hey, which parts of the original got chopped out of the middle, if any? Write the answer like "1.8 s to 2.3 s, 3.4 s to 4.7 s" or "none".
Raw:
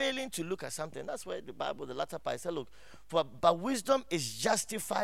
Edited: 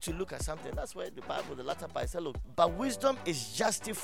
2.8 s to 3.3 s

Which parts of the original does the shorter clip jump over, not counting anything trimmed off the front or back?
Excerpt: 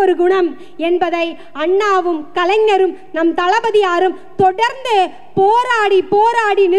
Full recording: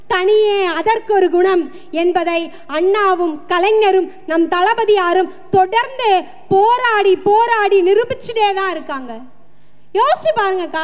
none

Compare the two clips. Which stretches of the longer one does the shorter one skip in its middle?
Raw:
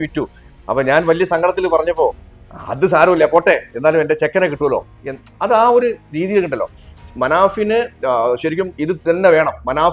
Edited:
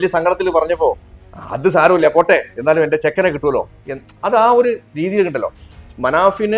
none

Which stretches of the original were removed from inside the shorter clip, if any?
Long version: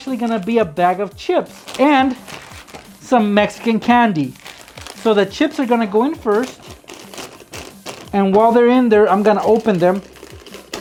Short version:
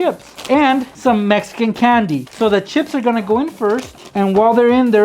2.2 s to 3.0 s, 4.3 s to 4.9 s, 6.6 s to 8.0 s

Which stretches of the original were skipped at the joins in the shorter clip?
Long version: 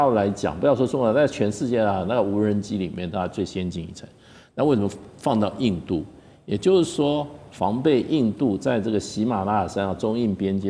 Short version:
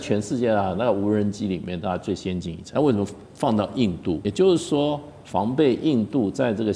3.9 s to 4.4 s, 6.1 s to 6.5 s

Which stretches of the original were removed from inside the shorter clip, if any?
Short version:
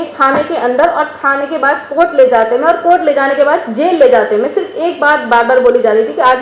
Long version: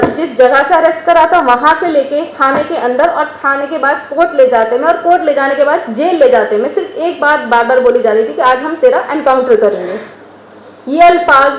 none

